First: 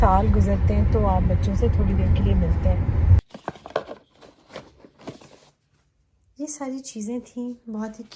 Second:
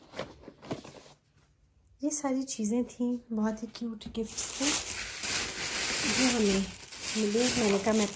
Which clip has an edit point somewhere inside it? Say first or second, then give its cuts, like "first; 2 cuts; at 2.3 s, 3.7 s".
first; 1 cut; at 3.2 s